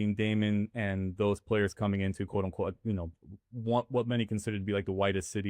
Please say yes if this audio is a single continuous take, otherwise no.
yes